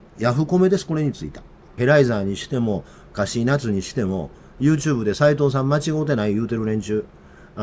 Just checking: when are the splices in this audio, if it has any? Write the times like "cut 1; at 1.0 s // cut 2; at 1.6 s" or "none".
cut 1; at 1.8 s